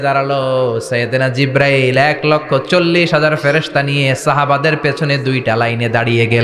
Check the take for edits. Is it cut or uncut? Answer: uncut